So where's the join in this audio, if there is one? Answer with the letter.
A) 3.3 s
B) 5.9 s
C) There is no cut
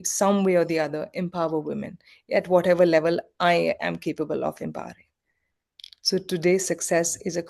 C